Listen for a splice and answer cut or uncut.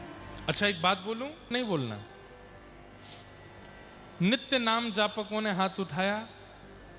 cut